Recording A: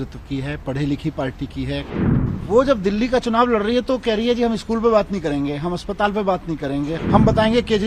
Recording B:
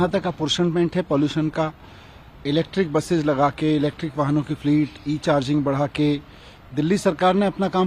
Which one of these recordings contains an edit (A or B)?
A